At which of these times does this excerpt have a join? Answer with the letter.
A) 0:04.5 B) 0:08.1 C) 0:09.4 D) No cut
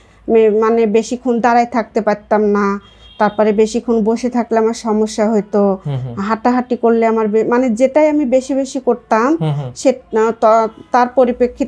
D